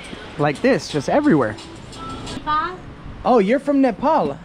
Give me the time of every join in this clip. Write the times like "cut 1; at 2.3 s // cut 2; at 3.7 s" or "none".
cut 1; at 2.4 s